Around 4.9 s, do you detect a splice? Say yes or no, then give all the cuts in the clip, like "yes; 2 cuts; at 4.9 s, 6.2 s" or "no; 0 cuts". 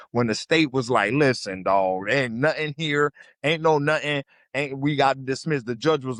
no; 0 cuts